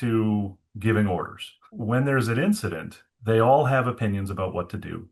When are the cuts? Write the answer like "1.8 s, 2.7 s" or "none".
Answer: 1.7 s